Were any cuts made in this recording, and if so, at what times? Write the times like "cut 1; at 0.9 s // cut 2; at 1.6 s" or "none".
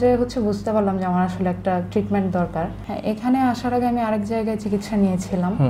cut 1; at 2.8 s